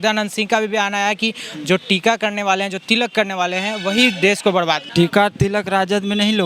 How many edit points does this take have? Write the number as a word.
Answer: one